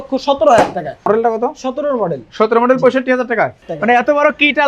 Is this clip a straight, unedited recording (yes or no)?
no